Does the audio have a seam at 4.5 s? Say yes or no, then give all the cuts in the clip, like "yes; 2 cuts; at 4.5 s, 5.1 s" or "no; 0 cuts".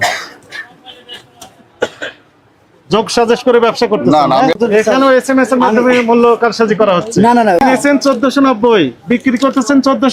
yes; 2 cuts; at 4.5 s, 7.6 s